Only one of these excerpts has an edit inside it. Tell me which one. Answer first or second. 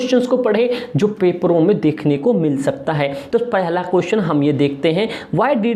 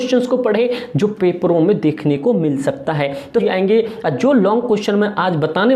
second